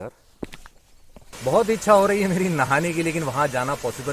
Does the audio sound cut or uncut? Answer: cut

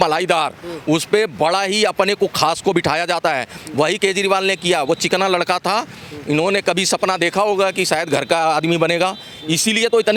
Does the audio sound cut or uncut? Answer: uncut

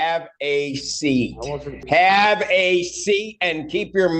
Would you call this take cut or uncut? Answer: cut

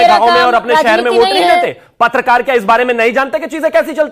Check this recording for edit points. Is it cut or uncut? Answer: uncut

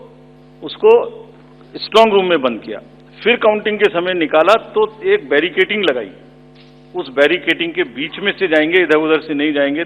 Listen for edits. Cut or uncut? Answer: uncut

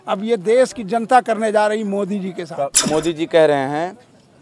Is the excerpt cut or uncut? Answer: cut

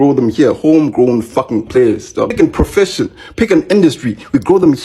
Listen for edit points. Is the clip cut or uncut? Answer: cut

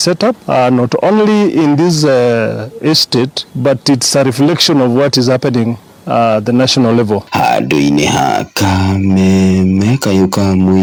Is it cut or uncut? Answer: uncut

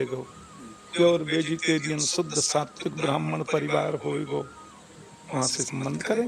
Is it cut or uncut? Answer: uncut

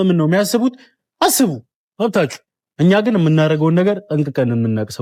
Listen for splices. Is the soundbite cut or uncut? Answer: uncut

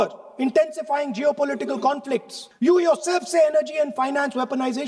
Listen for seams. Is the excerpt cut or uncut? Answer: cut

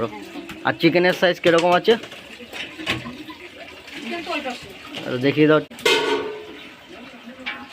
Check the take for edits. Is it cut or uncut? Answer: cut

